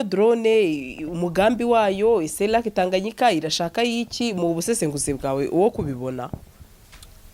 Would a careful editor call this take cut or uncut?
uncut